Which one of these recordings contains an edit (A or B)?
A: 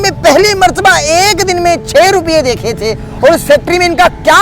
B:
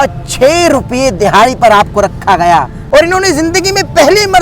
B